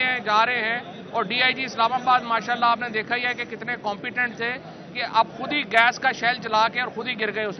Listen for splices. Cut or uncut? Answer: uncut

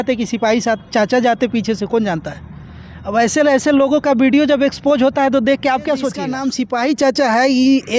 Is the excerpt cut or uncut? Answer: cut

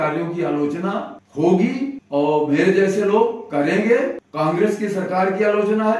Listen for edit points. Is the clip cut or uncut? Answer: cut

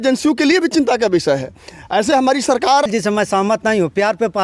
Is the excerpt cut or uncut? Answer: cut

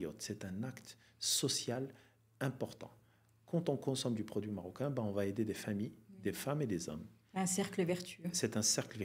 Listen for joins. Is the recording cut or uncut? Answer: uncut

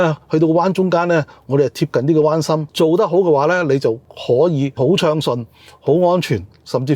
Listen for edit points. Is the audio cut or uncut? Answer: cut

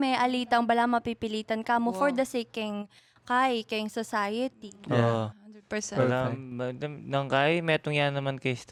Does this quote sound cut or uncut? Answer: uncut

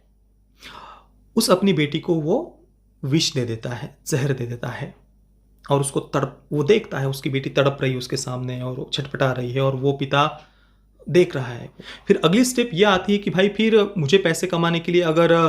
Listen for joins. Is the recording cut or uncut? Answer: cut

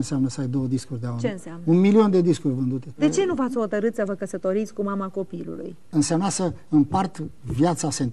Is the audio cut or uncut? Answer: uncut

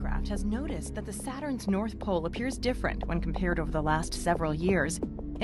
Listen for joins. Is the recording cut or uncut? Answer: cut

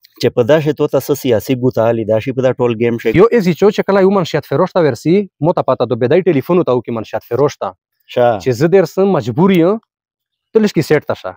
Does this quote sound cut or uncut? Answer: cut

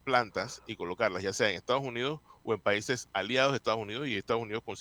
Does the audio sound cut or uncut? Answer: uncut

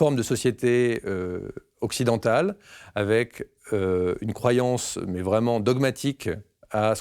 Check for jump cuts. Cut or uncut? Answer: uncut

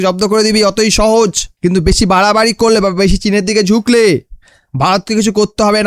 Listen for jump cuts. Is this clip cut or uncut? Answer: cut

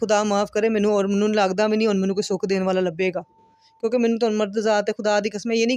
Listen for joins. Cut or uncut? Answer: uncut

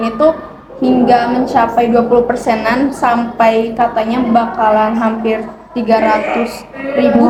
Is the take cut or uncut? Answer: uncut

